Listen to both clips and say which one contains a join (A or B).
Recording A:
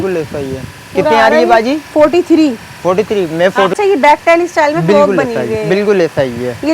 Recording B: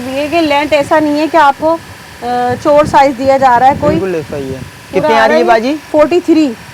A